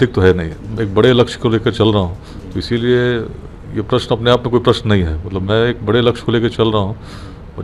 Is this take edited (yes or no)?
no